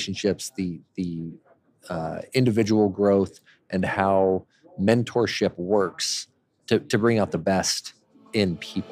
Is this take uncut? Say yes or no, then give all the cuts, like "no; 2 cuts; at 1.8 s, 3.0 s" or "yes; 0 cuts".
no; 1 cut; at 6.6 s